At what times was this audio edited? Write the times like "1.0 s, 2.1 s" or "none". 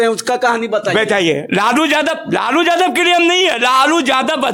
none